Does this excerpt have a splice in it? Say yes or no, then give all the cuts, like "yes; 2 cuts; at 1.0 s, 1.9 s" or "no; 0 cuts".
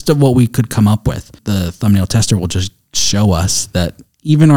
yes; 1 cut; at 1.4 s